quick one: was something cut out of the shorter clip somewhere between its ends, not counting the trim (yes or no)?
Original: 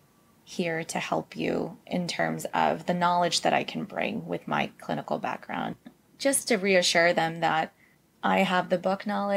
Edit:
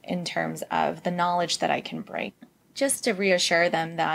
yes